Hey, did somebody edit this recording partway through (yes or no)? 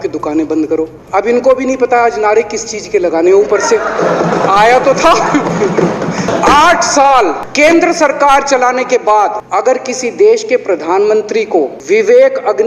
yes